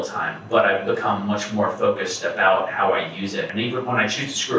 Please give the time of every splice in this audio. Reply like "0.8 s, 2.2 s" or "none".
3.5 s